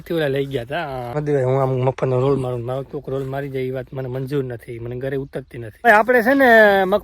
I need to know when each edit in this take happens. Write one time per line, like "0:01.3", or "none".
0:01.2
0:05.8

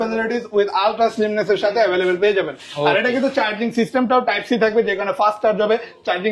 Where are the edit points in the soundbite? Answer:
none

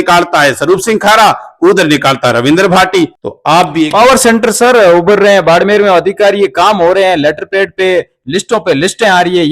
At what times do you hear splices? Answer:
0:03.3

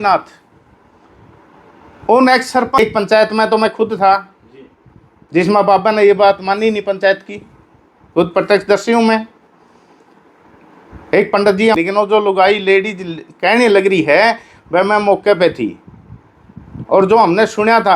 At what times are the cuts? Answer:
0:02.8
0:11.8

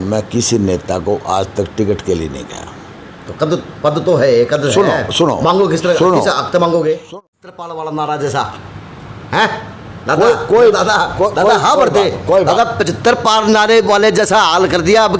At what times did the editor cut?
0:07.0

